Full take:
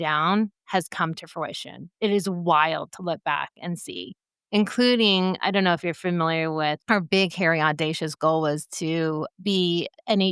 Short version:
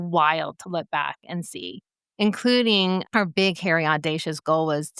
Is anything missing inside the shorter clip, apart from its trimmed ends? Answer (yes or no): yes